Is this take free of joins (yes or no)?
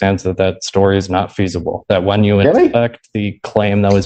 yes